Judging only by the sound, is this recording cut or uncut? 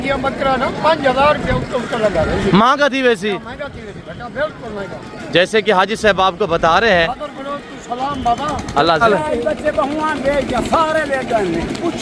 cut